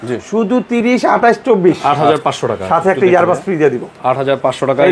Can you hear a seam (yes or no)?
yes